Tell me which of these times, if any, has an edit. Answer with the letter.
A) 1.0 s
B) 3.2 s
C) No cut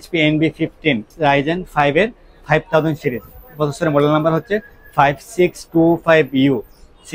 C